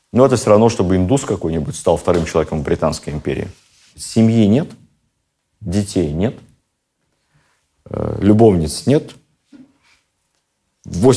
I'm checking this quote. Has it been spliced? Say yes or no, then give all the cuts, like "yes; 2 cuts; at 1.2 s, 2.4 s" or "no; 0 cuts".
yes; 1 cut; at 3.8 s